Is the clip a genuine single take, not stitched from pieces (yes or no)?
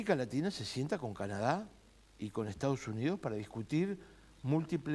yes